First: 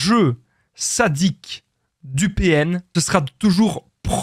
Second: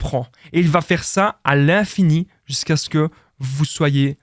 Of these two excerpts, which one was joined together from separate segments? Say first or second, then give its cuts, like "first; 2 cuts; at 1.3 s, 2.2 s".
first; 1 cut; at 2.8 s